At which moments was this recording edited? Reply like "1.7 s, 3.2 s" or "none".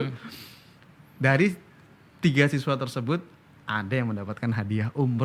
none